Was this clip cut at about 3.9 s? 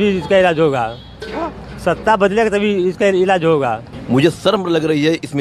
yes; 1 cut; at 3.9 s

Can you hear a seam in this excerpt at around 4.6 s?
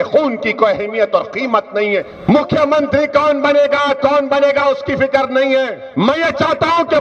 no; 2 cuts; at 2.1 s, 5.8 s

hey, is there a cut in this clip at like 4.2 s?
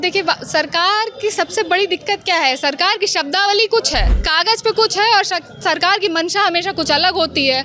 yes; 1 cut; at 4.2 s

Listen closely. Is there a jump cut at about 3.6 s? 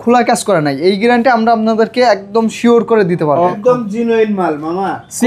yes; 1 cut; at 3.6 s

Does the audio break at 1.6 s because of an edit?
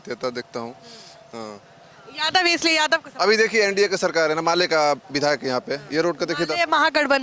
no; 0 cuts

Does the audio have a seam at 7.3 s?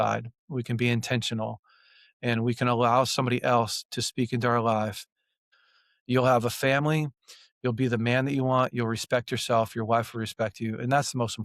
no; 1 cut; at 5.5 s

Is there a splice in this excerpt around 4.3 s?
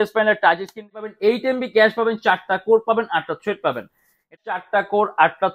yes; 2 cuts; at 1.0 s, 4.3 s

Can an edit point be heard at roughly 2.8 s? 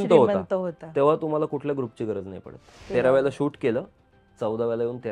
yes; 1 cut; at 2.8 s

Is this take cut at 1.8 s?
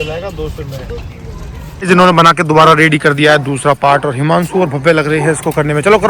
yes; 1 cut; at 1.8 s

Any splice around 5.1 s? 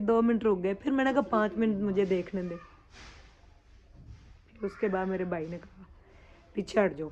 no; 0 cuts

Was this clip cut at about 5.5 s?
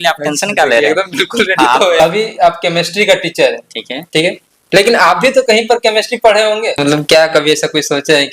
no; 2 cuts; at 2.0 s, 6.8 s

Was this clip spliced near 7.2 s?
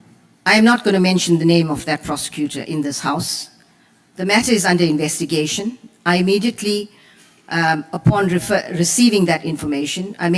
no; 0 cuts

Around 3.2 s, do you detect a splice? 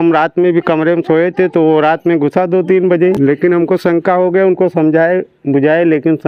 yes; 1 cut; at 3.2 s

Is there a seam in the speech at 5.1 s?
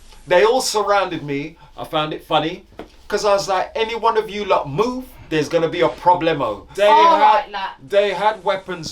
no; 1 cut; at 6.6 s

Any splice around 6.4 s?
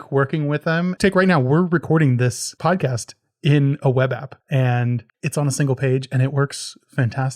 no; 4 cuts; at 0.9 s, 2.5 s, 4.3 s, 5.1 s

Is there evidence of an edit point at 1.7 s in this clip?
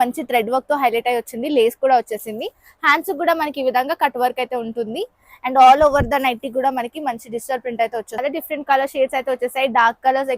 no; 1 cut; at 8.2 s

